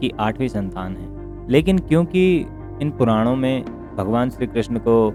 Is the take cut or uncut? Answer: uncut